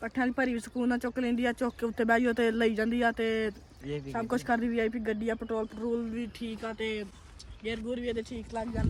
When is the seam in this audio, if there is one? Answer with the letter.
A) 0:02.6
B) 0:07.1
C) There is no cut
C